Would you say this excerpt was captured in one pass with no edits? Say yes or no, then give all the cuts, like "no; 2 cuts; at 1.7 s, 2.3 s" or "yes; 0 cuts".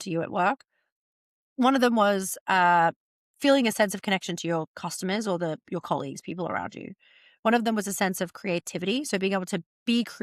yes; 0 cuts